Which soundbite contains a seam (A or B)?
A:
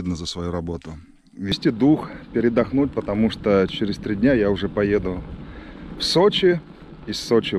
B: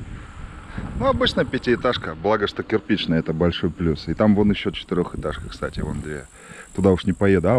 A